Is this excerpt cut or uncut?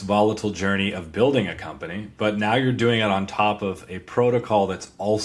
uncut